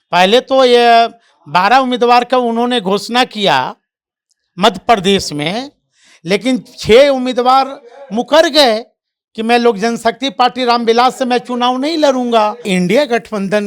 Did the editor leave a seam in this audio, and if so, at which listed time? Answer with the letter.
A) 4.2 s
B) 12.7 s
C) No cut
B